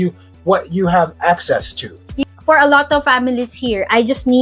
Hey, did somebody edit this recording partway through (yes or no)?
yes